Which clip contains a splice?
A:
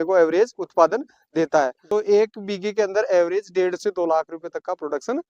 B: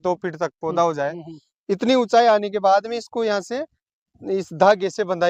A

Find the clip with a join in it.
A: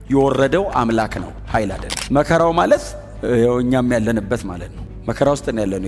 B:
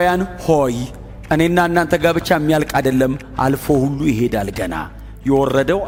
A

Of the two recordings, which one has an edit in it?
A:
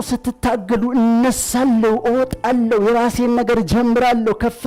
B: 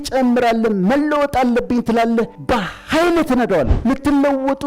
B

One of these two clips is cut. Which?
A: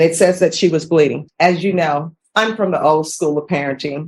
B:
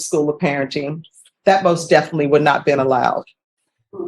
A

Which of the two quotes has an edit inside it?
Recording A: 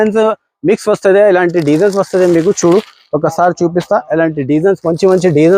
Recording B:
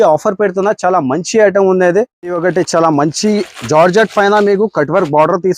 B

